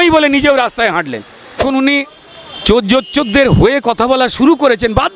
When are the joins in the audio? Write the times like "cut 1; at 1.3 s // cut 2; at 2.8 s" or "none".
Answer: cut 1; at 1.6 s